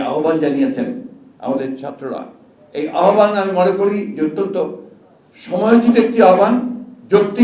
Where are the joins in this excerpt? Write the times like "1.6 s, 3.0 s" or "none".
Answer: none